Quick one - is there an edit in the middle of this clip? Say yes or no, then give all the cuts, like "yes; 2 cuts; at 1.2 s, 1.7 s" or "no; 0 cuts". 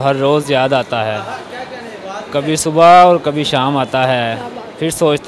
no; 0 cuts